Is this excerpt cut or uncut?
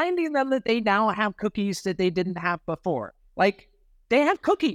cut